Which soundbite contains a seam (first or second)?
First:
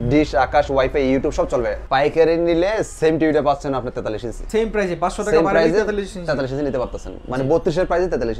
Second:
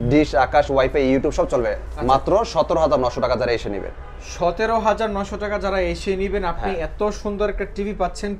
first